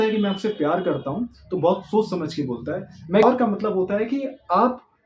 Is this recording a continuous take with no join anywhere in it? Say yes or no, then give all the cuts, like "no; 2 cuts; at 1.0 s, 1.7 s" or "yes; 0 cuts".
no; 1 cut; at 3.2 s